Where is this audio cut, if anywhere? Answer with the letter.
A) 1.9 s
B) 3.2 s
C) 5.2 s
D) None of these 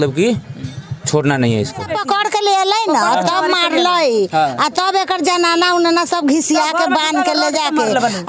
A